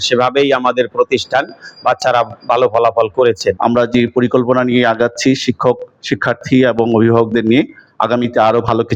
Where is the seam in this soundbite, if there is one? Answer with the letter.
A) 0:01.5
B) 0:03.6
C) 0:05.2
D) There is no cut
B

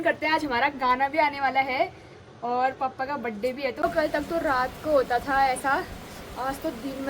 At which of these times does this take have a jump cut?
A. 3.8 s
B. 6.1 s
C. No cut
A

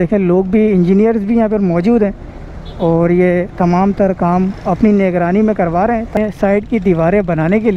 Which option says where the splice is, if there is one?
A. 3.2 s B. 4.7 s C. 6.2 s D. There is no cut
C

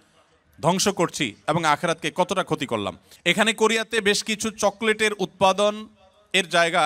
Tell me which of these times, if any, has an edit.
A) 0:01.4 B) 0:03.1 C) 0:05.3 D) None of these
B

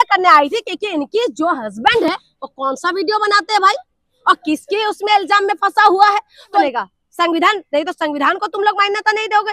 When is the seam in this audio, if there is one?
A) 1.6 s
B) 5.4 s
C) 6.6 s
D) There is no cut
C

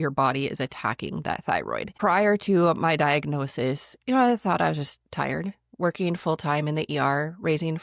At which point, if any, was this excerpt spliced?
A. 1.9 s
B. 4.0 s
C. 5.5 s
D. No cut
A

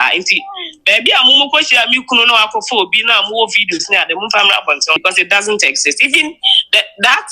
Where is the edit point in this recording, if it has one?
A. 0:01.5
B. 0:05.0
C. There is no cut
B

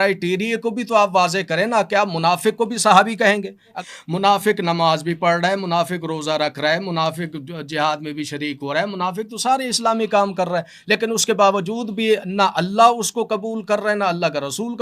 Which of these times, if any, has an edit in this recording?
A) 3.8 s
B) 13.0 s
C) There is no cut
A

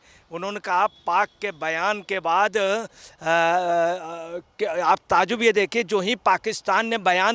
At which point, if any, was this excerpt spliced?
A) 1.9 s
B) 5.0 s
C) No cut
C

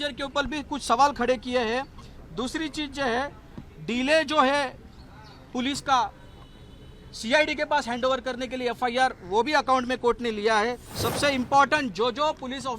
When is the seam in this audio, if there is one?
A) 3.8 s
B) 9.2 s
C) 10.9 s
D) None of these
C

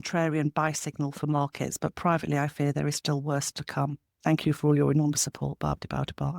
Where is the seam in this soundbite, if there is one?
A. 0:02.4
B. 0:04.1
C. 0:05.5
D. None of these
B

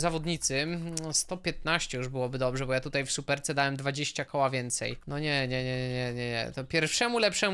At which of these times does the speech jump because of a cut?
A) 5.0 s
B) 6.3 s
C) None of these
A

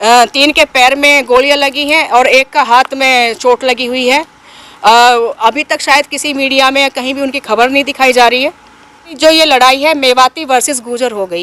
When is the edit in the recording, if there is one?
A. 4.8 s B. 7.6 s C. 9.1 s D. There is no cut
C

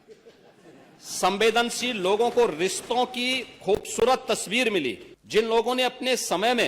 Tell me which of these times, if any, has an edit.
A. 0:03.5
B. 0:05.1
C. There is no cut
B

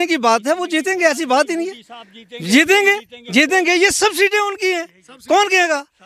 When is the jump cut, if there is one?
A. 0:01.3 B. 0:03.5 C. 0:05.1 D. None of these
D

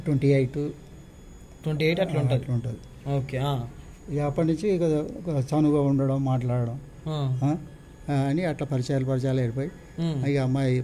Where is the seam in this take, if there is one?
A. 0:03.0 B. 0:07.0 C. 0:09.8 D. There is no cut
D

